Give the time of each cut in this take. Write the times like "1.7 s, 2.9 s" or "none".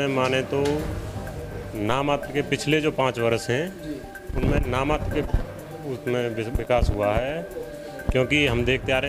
none